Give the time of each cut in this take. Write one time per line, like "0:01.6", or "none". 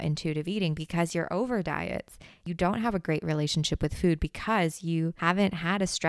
0:02.4
0:05.2